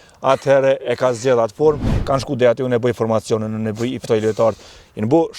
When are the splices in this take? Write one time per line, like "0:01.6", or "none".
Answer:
0:01.9